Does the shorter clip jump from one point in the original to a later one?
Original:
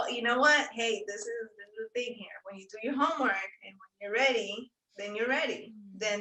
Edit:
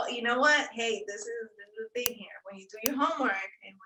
no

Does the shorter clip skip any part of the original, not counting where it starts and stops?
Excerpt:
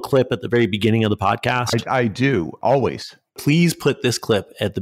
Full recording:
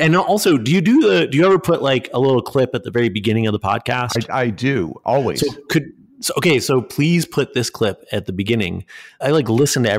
yes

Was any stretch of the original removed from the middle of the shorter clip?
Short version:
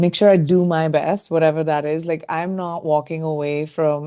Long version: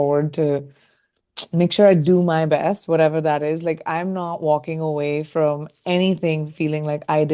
no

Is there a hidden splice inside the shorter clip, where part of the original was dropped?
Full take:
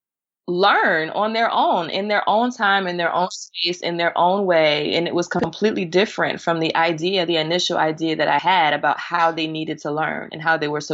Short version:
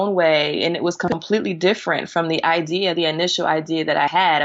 no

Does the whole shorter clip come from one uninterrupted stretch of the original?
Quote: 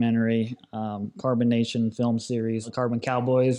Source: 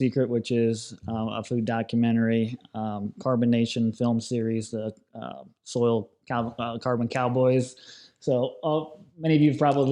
no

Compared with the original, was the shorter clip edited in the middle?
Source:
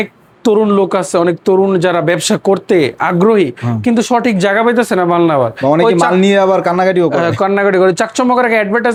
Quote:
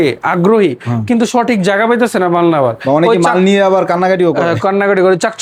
no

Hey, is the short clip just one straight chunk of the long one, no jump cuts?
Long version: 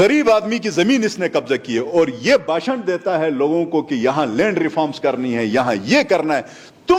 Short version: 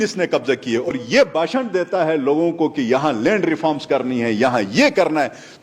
no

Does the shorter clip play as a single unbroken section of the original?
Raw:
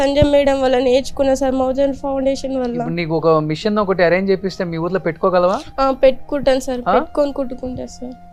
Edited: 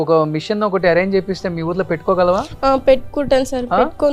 yes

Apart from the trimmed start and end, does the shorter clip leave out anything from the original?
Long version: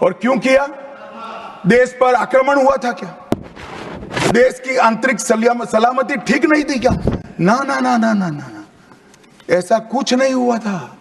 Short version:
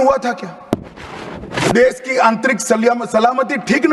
no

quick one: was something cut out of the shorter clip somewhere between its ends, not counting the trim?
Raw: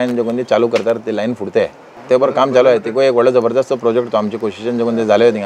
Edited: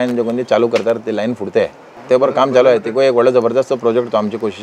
no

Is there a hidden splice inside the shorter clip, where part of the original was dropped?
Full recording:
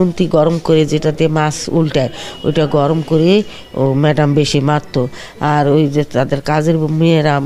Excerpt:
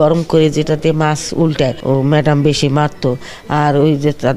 yes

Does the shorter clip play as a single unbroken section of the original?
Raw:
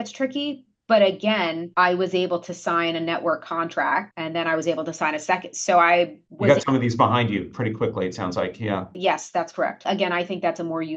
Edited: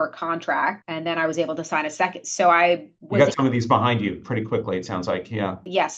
yes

